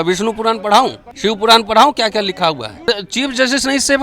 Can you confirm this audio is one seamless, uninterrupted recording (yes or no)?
no